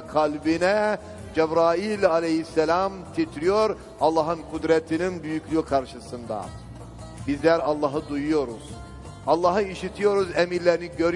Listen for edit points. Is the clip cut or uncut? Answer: cut